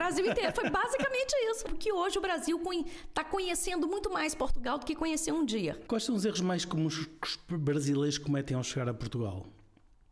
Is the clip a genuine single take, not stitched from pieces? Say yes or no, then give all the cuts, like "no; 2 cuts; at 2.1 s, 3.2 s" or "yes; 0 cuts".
no; 2 cuts; at 1.7 s, 5.8 s